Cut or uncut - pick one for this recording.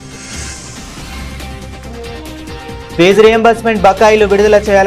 cut